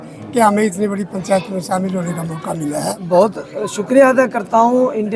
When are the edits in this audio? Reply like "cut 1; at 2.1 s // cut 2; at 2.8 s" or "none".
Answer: cut 1; at 3.0 s